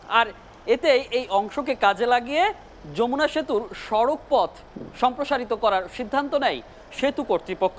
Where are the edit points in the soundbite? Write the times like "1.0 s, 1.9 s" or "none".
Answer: none